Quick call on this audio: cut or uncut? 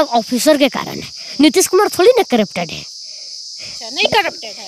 uncut